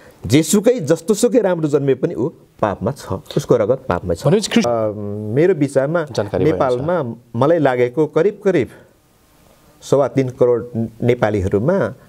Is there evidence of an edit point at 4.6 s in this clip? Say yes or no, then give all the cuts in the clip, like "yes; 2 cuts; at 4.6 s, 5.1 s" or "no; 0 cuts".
yes; 1 cut; at 4.6 s